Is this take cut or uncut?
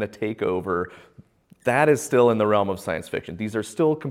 uncut